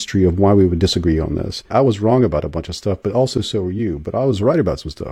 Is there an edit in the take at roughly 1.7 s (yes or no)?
yes